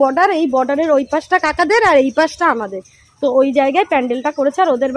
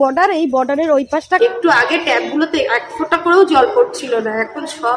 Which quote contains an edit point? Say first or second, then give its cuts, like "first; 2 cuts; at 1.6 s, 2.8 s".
second; 1 cut; at 1.4 s